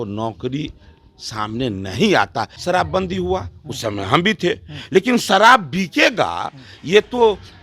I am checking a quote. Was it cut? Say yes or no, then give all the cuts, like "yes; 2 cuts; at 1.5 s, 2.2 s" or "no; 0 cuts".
yes; 1 cut; at 2.5 s